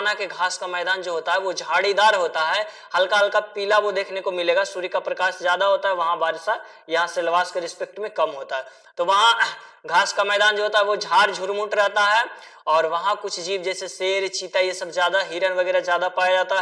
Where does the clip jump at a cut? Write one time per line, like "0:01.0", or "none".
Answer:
none